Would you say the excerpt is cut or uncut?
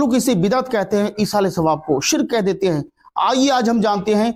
uncut